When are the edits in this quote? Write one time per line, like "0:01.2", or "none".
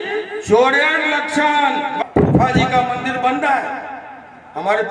0:02.0